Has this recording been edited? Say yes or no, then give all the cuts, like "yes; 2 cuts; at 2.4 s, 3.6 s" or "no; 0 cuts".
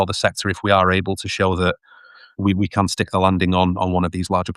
yes; 1 cut; at 2.3 s